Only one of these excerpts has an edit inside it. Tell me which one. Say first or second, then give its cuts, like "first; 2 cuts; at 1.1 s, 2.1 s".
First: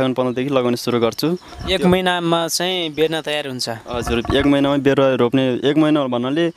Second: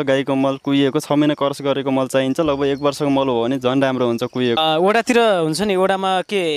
second; 1 cut; at 4.6 s